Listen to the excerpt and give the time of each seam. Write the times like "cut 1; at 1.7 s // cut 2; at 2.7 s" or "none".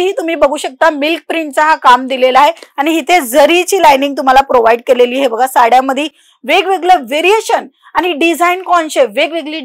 none